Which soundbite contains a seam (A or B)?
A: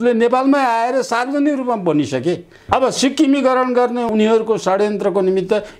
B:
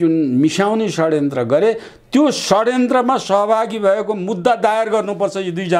A